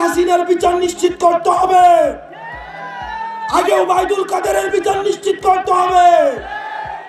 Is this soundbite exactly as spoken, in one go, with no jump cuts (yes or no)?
yes